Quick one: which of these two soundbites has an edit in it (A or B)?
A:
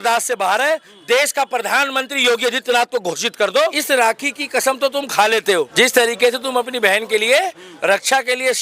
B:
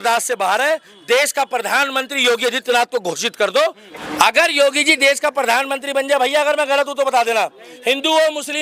A